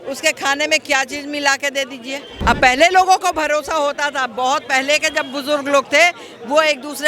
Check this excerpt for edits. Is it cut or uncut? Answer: cut